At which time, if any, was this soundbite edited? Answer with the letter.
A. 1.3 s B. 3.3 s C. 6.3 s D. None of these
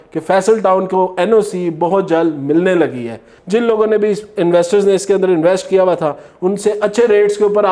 B